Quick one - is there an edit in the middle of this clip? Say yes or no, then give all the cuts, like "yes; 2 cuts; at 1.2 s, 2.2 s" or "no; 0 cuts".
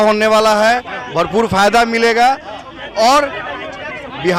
no; 0 cuts